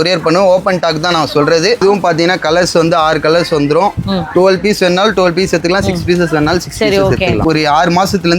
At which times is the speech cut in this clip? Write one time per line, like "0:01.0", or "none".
0:01.8
0:07.4